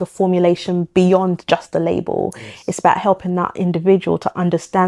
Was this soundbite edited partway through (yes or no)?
no